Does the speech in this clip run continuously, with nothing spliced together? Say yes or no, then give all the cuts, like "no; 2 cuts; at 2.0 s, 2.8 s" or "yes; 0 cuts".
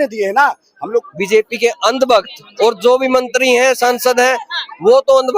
no; 1 cut; at 1.0 s